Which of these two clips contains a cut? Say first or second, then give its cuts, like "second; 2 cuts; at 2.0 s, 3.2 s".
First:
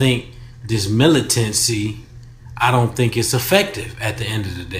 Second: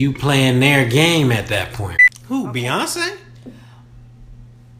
second; 1 cut; at 1.9 s